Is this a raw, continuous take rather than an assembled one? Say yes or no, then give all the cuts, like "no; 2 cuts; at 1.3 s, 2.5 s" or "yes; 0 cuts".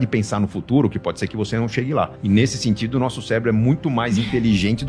no; 1 cut; at 2.2 s